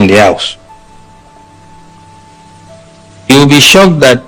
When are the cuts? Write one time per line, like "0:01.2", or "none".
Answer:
none